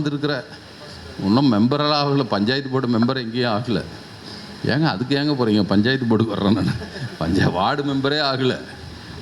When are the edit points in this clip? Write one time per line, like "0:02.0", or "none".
none